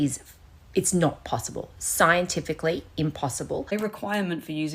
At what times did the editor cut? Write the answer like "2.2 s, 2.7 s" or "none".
3.7 s